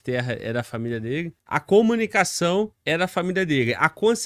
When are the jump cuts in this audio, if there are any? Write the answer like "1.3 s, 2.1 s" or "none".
1.6 s, 2.8 s